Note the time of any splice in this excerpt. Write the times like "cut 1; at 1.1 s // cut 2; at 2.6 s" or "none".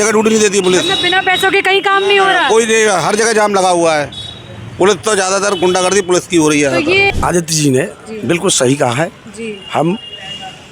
cut 1; at 7.1 s